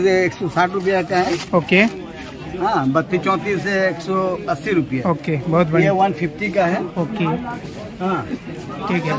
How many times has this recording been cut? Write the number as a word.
zero